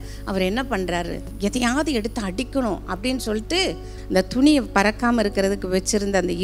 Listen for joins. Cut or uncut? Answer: uncut